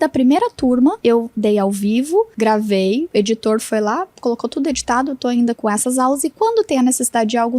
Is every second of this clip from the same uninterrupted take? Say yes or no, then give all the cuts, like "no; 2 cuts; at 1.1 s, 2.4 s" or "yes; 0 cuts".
no; 5 cuts; at 1.0 s, 2.3 s, 3.1 s, 4.1 s, 5.6 s